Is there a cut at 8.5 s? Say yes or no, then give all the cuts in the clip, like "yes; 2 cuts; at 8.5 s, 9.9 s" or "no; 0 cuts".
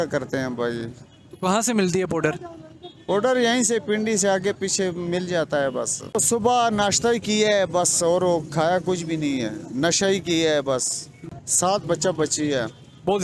no; 2 cuts; at 6.1 s, 11.2 s